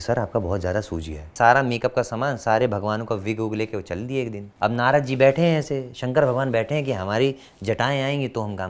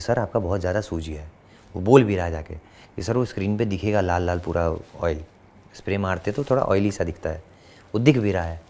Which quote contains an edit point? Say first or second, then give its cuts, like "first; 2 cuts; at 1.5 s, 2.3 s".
first; 2 cuts; at 1.3 s, 4.4 s